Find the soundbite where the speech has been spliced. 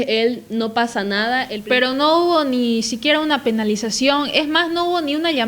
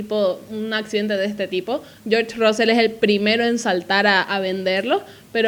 first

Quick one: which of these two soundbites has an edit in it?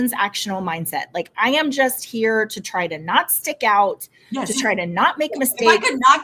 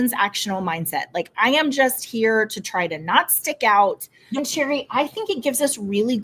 second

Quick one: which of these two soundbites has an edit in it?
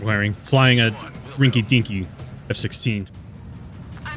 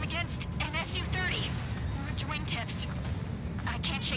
first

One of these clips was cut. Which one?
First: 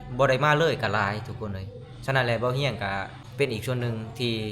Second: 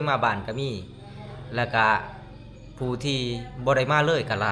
first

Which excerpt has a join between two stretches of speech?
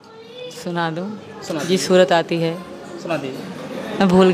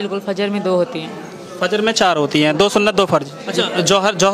second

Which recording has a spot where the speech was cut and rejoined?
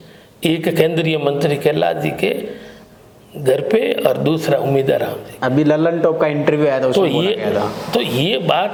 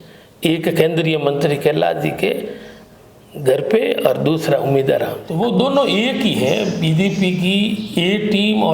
second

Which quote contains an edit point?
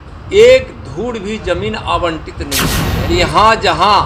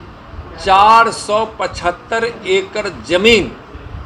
first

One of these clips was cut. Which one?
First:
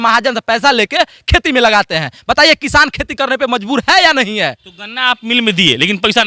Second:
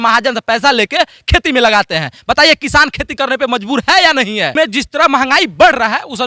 second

